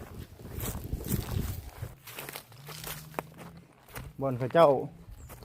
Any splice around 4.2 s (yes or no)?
no